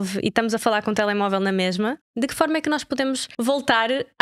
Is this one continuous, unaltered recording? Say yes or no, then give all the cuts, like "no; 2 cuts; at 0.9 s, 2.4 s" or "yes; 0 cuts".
no; 2 cuts; at 2.0 s, 3.3 s